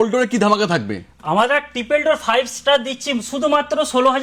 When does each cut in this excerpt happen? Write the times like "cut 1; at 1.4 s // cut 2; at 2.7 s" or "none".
none

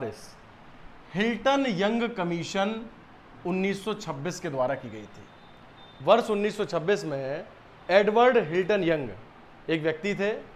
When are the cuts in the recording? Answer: none

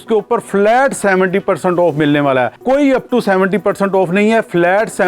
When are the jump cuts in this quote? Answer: cut 1; at 2.6 s

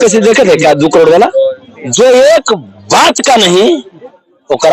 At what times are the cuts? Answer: cut 1; at 1.6 s

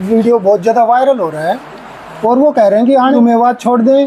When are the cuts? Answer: cut 1; at 3.2 s

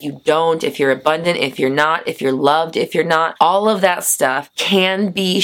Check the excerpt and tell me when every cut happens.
cut 1; at 4.5 s

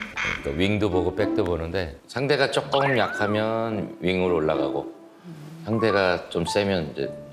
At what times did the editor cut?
none

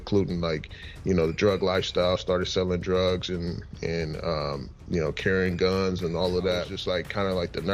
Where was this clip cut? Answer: cut 1; at 6.7 s

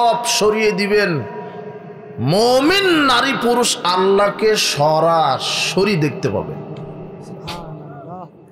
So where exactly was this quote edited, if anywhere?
none

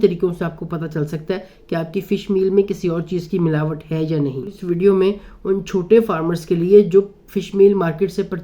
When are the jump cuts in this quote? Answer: cut 1; at 4.6 s

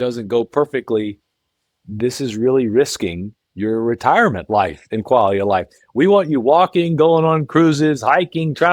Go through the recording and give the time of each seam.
none

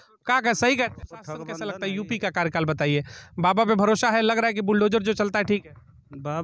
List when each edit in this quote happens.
cut 1; at 1.5 s

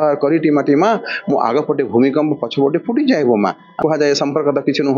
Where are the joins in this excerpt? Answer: cut 1; at 3.8 s

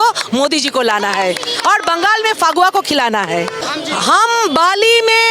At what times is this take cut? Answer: cut 1; at 3.6 s

